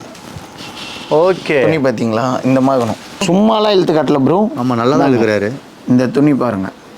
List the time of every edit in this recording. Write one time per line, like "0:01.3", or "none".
0:03.2